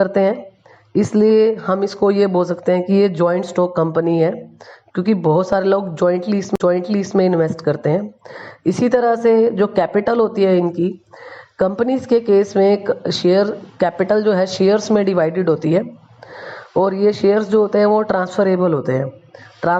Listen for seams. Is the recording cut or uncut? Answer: uncut